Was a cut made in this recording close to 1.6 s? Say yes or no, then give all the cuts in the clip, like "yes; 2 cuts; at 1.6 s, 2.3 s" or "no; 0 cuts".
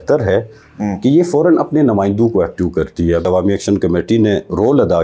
no; 1 cut; at 3.2 s